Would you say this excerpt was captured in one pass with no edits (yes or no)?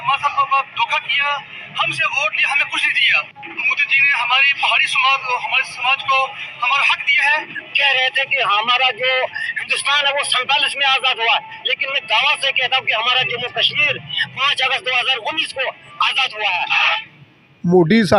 yes